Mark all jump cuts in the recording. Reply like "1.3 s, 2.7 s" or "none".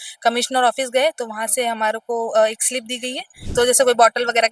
3.4 s